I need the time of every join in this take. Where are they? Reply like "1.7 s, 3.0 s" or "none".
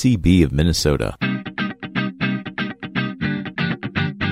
1.1 s